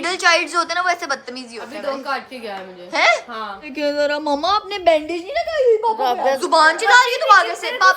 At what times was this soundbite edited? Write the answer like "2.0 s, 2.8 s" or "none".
3.7 s, 6.4 s